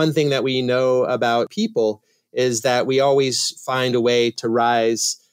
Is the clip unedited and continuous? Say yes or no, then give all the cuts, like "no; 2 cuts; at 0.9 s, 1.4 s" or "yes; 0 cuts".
no; 2 cuts; at 1.5 s, 4.4 s